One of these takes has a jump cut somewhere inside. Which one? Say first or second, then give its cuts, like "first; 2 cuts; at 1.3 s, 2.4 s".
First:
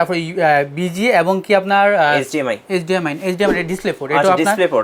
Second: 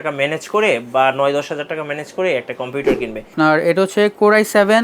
second; 1 cut; at 3.3 s